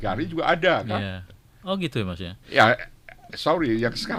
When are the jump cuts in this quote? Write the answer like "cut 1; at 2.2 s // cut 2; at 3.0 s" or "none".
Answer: none